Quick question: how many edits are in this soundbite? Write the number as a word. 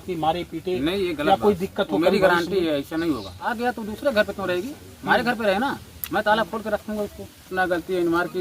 two